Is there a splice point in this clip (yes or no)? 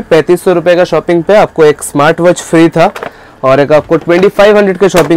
no